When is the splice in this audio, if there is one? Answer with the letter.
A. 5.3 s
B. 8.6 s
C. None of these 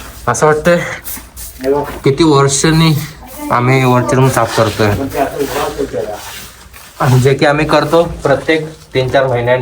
C